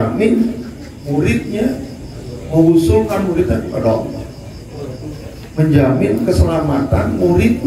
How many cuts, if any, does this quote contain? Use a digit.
0